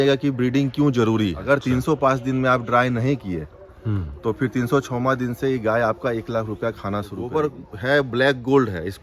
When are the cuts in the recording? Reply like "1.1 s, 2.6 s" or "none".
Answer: 1.4 s, 7.2 s